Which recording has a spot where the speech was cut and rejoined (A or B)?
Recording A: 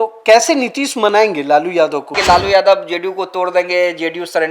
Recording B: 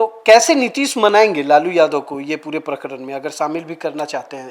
A